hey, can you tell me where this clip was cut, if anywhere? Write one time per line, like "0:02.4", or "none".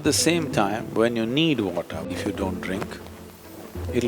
0:02.1